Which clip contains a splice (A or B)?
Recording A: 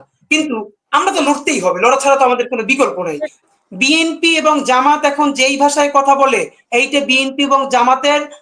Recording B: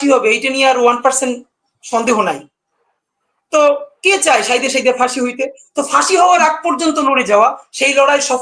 A